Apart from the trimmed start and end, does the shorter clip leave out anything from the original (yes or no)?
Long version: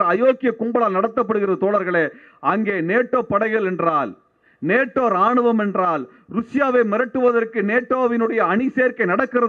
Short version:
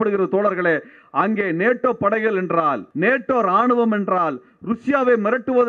yes